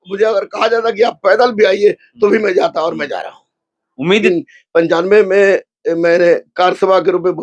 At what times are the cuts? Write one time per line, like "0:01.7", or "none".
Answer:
0:04.2